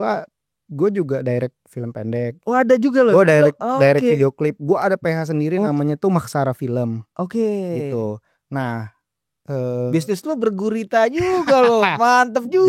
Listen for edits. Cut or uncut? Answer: uncut